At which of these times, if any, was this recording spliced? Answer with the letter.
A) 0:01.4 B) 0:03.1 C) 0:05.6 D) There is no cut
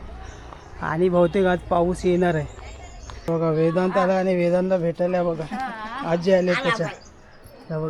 B